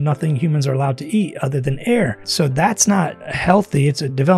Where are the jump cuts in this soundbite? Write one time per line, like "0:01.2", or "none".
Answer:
0:02.2
0:03.2